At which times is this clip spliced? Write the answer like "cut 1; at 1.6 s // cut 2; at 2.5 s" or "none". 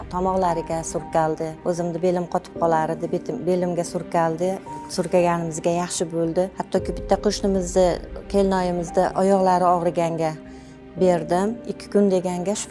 cut 1; at 1.6 s // cut 2; at 6.6 s // cut 3; at 11.6 s